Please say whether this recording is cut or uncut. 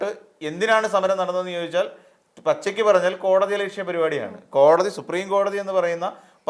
uncut